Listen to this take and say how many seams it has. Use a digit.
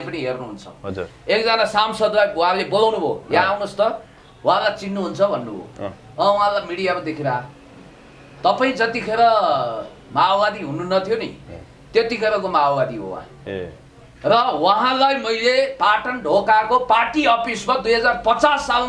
0